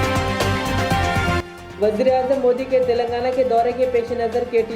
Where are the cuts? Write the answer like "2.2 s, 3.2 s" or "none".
1.4 s